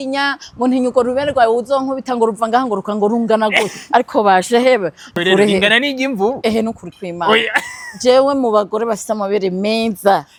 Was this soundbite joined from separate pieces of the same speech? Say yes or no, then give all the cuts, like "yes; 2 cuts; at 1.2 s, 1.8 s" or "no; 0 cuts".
no; 0 cuts